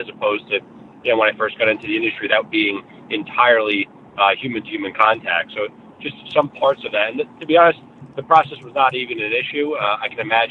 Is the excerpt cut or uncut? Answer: uncut